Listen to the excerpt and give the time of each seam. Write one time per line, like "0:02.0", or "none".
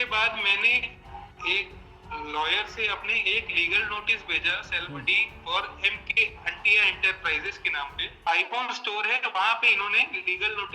0:08.2